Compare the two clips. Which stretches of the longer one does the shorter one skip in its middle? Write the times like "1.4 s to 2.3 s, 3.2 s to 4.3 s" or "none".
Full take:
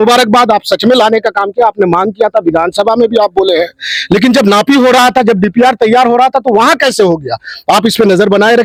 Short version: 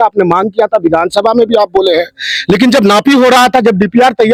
none